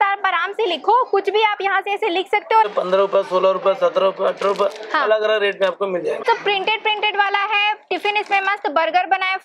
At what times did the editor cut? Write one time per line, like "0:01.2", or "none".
0:02.7
0:06.2